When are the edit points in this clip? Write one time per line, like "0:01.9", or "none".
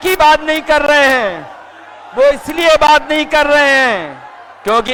none